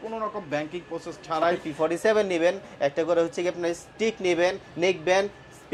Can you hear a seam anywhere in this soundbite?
yes; 1 cut; at 1.6 s

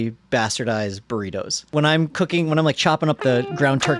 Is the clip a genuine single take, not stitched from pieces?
no; 1 cut; at 1.5 s

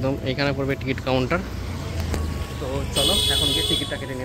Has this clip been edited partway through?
no; 0 cuts

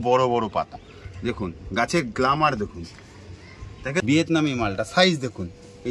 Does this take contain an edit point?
yes; 1 cut; at 4.1 s

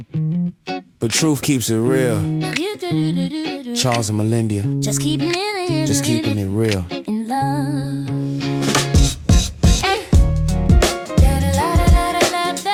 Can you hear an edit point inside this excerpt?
no; 0 cuts

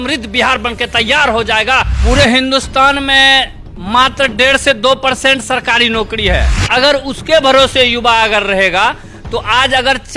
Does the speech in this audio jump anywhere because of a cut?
yes; 2 cuts; at 1.9 s, 6.5 s

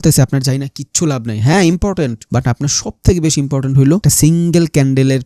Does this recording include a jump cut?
yes; 2 cuts; at 2.2 s, 4.0 s

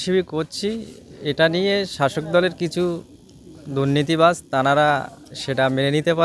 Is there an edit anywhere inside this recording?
no; 0 cuts

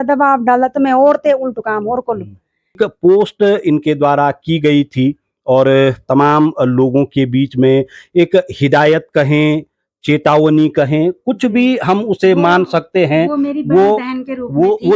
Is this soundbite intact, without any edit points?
no; 1 cut; at 2.8 s

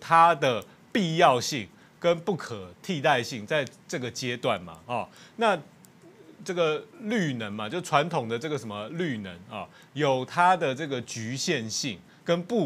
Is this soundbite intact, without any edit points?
yes; 0 cuts

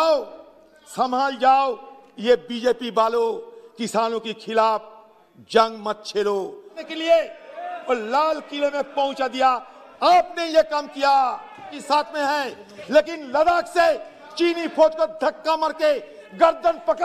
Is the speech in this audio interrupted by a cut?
yes; 2 cuts; at 6.9 s, 11.7 s

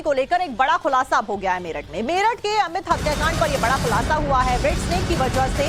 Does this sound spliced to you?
no; 0 cuts

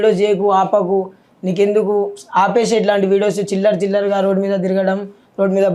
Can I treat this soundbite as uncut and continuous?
yes; 0 cuts

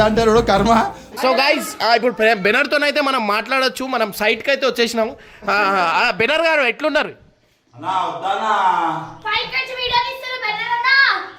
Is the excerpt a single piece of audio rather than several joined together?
yes; 0 cuts

